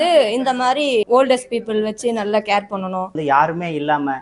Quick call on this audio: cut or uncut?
cut